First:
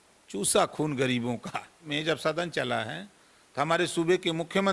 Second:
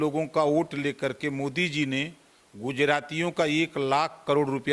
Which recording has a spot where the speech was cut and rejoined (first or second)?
first